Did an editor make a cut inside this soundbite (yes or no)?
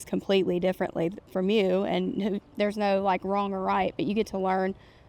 no